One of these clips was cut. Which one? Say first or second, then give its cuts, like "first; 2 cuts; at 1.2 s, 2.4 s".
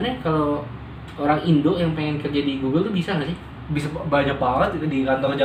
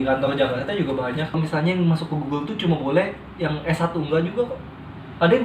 second; 1 cut; at 1.4 s